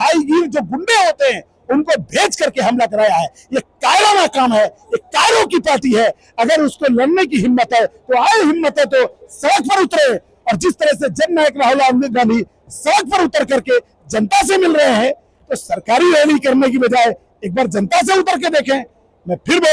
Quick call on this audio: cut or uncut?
uncut